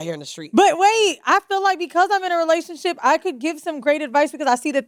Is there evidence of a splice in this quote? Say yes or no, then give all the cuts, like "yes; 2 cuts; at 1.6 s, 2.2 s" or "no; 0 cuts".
no; 0 cuts